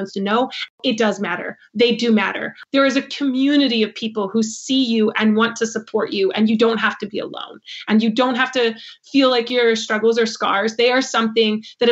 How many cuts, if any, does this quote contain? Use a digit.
2